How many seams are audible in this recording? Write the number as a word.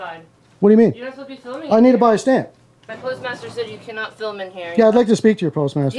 one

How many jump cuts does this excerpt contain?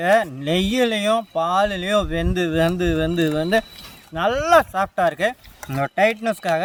zero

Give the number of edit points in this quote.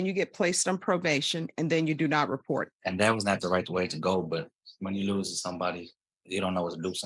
one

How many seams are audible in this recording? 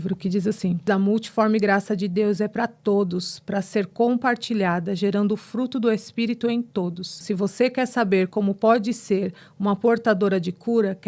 two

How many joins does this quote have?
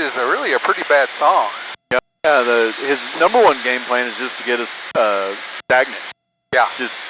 one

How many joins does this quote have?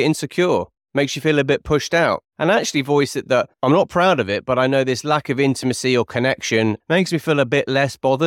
one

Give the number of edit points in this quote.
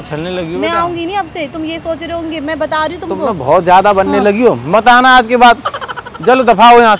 zero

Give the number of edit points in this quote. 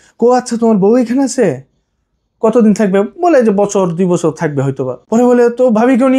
one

